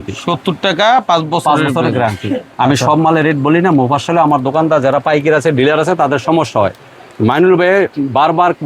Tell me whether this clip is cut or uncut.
uncut